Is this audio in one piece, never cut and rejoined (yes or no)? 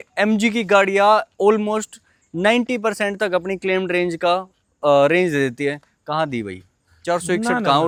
yes